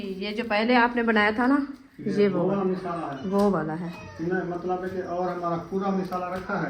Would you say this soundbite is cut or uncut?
uncut